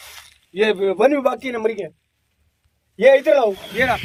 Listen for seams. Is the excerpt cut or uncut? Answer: uncut